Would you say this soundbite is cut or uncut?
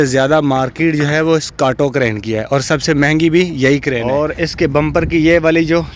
cut